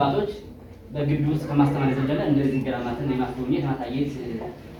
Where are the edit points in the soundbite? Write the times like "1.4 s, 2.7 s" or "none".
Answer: none